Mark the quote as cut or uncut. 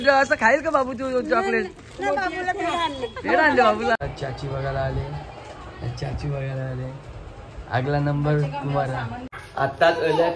cut